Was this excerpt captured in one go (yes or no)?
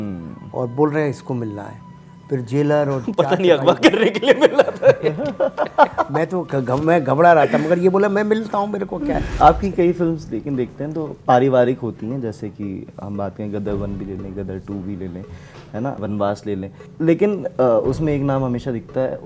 no